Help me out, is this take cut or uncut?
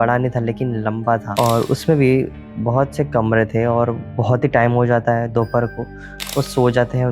cut